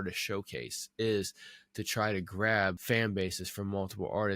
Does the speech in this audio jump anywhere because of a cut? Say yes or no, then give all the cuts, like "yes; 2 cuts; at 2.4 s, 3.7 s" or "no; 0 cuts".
yes; 1 cut; at 2.8 s